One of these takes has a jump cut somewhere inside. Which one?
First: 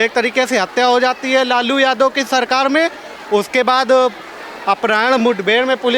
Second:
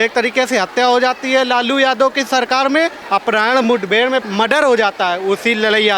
second; 2 cuts; at 3.0 s, 4.2 s

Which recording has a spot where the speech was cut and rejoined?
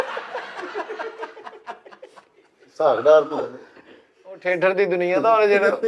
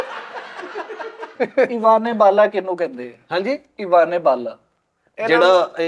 second; 1 cut; at 1.4 s

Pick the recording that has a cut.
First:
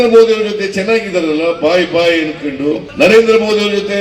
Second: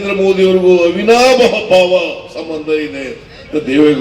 first; 1 cut; at 2.9 s

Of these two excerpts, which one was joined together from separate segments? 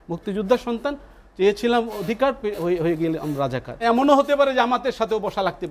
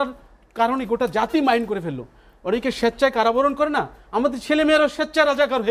first; 1 cut; at 3.8 s

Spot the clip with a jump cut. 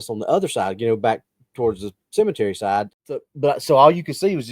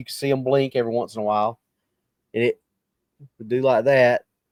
first; 1 cut; at 3.3 s

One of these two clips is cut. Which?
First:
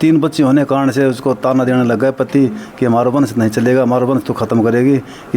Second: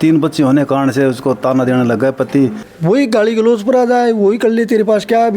second; 1 cut; at 2.6 s

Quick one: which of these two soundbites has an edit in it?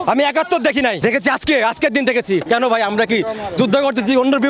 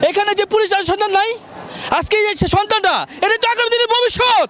first; 2 cuts; at 1.0 s, 2.4 s

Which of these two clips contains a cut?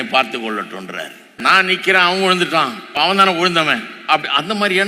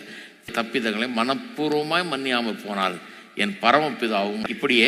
first; 2 cuts; at 1.4 s, 2.9 s

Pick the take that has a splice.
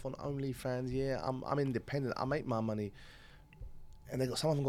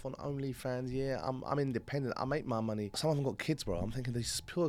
second; 1 cut; at 3.0 s

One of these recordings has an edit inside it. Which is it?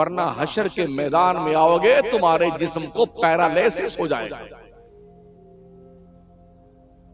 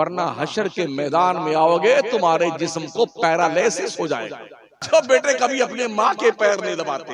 second; 1 cut; at 4.8 s

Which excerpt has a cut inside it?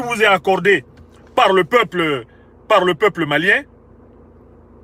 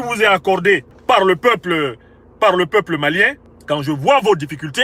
second; 2 cuts; at 0.9 s, 3.5 s

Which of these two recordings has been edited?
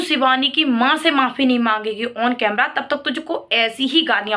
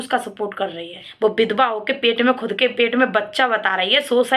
second; 1 cut; at 1.0 s

